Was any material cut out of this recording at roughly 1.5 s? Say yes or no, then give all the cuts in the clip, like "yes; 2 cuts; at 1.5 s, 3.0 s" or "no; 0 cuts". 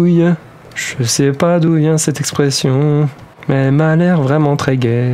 no; 1 cut; at 3.3 s